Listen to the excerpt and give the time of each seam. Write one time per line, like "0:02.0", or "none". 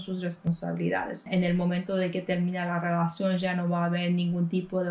0:01.2